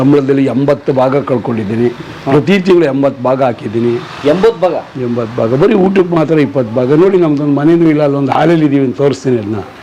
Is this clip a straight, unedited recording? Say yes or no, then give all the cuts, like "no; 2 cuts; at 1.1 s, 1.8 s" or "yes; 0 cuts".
yes; 0 cuts